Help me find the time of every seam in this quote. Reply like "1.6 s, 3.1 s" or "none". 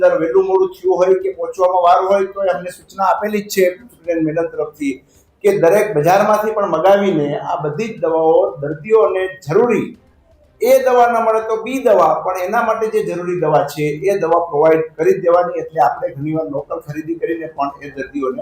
none